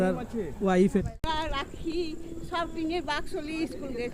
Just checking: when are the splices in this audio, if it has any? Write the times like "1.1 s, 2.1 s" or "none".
1.0 s